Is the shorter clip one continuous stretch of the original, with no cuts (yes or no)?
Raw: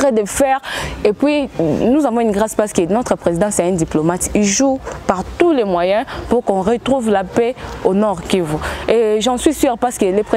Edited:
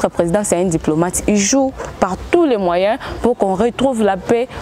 yes